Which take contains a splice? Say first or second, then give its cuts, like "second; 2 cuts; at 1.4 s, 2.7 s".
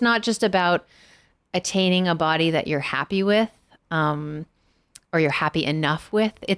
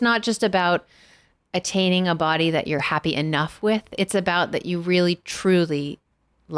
second; 1 cut; at 2.8 s